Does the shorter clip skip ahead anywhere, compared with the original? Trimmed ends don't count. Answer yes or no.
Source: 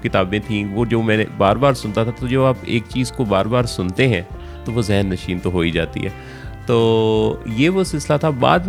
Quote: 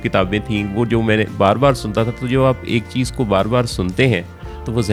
no